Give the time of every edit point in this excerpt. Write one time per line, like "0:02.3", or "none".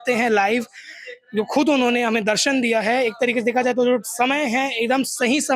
none